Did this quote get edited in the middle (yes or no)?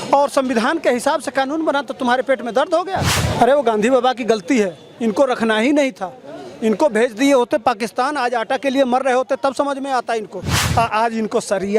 yes